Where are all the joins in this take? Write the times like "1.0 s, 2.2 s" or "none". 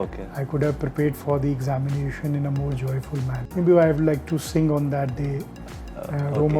3.4 s